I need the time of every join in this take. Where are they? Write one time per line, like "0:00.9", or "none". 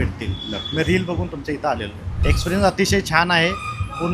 0:01.9